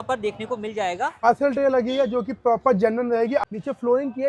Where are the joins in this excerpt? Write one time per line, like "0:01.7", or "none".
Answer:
0:01.2
0:03.4